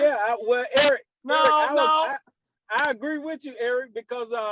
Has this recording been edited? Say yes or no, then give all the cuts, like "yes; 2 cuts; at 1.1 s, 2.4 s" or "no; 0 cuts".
no; 0 cuts